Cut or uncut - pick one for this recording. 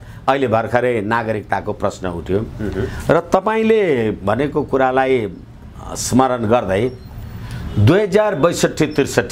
uncut